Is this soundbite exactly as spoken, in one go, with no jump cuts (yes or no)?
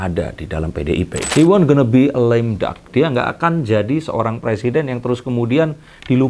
no